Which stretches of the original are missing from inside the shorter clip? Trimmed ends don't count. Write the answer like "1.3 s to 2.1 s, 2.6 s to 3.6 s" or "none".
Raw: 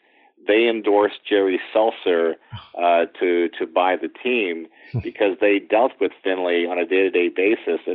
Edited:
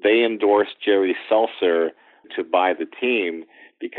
2.7 s to 3.5 s